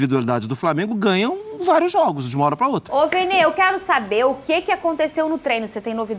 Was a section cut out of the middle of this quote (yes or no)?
yes